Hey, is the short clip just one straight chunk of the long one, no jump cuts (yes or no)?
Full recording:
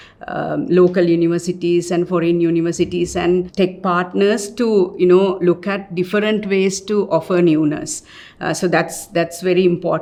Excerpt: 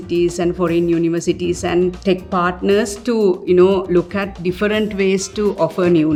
yes